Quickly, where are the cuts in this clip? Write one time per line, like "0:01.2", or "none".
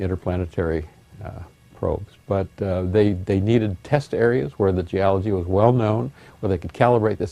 0:02.1